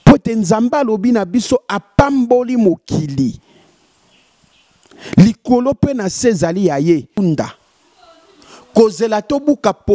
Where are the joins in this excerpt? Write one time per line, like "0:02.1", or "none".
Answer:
0:07.2